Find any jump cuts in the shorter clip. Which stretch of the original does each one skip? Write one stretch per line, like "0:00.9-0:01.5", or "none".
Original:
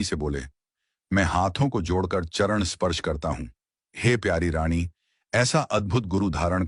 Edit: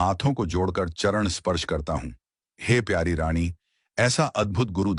none